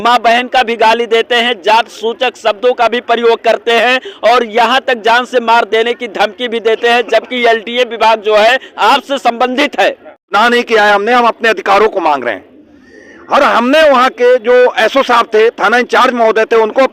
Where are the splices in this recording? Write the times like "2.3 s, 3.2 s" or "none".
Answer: 10.3 s